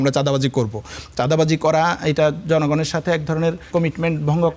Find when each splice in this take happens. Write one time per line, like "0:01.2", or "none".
0:03.6